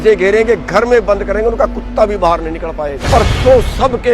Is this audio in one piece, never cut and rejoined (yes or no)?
no